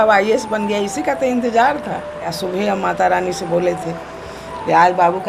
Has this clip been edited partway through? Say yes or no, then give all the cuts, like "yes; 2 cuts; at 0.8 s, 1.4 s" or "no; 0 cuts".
yes; 1 cut; at 2.3 s